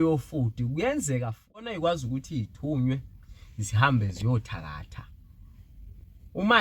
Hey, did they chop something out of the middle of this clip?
yes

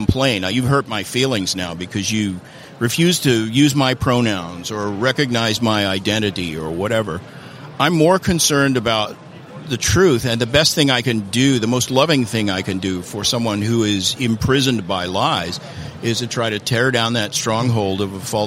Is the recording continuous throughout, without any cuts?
yes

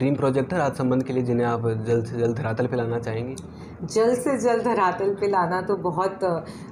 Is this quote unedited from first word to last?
yes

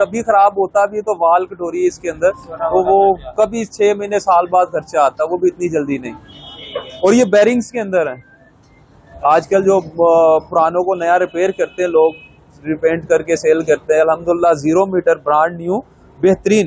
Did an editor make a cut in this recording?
no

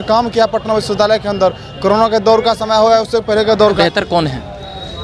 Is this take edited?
yes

